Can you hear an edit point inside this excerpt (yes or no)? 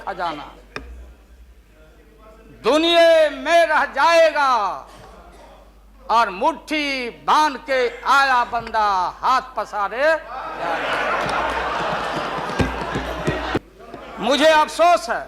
yes